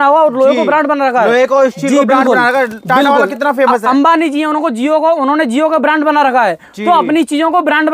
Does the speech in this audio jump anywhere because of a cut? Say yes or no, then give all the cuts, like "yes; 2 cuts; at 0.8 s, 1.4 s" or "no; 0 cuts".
no; 0 cuts